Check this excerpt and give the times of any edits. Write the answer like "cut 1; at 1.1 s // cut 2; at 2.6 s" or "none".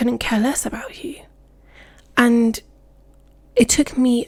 none